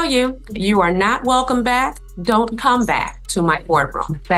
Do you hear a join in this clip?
no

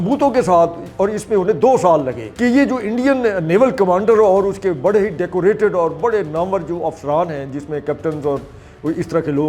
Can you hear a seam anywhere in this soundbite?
yes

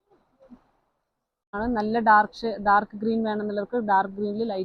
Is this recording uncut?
no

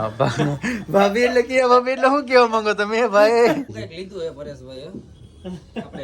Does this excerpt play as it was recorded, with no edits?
no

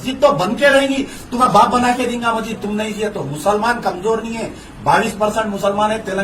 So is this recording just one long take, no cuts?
no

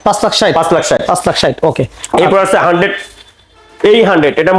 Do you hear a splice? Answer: no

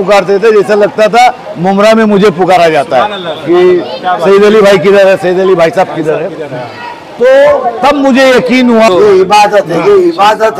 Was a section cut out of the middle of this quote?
yes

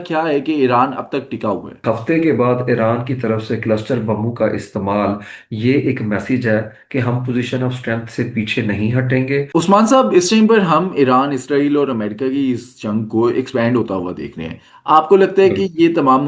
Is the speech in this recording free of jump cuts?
no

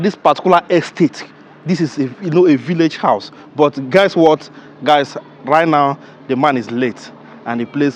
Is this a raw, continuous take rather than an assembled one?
yes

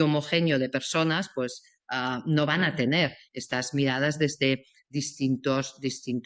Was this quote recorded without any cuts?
yes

